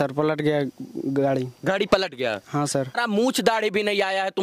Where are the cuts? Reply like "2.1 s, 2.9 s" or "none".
3.0 s

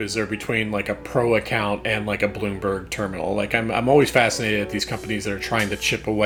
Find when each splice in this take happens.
none

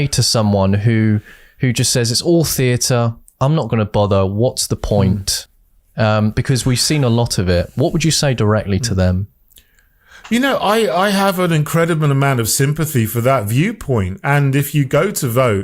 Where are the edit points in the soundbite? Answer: none

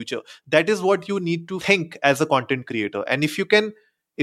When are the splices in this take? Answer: 1.5 s

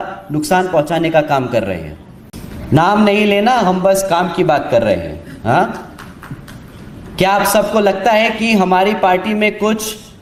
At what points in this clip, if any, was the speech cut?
none

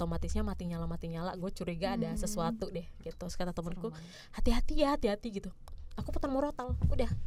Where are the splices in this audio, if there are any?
none

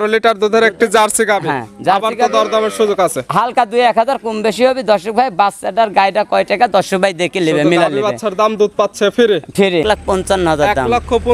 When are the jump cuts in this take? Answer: 9.8 s

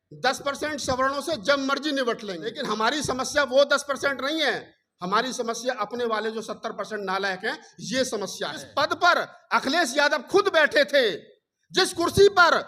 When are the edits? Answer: 2.6 s, 8.6 s

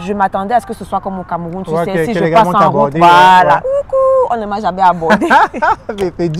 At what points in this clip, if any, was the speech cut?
none

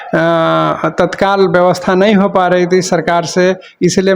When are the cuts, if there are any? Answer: none

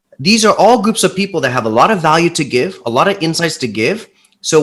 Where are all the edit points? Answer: none

